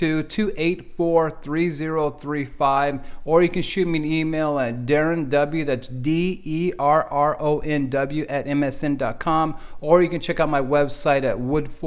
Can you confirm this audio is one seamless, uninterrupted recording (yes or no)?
yes